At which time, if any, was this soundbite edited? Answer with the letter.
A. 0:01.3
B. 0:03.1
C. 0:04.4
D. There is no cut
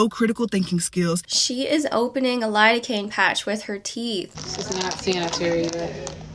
A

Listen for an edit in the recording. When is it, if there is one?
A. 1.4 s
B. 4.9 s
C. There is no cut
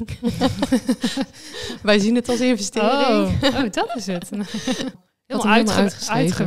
B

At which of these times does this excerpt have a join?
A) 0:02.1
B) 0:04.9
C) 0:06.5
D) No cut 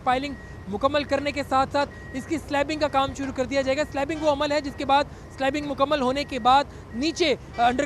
A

